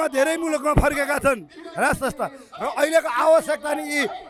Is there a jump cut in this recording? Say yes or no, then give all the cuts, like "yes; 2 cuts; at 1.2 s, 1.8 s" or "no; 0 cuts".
no; 0 cuts